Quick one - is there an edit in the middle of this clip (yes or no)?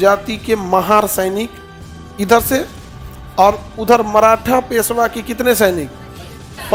no